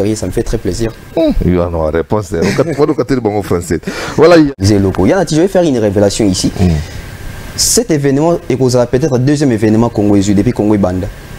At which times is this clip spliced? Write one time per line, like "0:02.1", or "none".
0:04.5